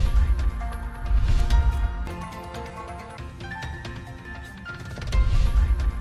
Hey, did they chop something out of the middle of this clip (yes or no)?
no